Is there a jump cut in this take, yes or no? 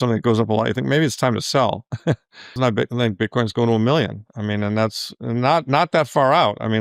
yes